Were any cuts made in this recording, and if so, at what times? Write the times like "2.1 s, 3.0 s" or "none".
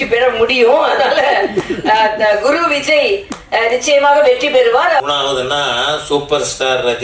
5.0 s